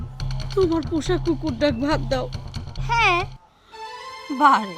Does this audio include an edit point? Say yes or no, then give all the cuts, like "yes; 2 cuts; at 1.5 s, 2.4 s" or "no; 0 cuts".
no; 0 cuts